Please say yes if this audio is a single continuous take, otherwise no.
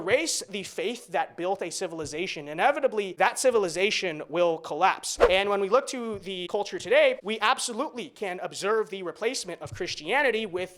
no